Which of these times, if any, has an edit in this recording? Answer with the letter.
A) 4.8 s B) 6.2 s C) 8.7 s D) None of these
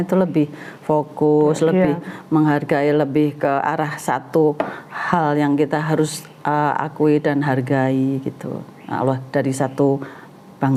D